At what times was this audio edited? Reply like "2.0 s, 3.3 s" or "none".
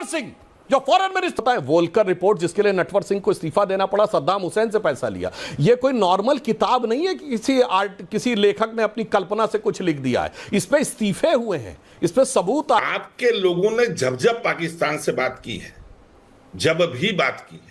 1.4 s, 12.8 s